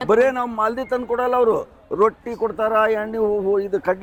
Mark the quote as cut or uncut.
uncut